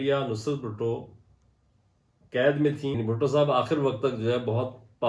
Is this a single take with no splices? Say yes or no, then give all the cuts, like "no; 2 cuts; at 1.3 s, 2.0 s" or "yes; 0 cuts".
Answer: no; 1 cut; at 3.0 s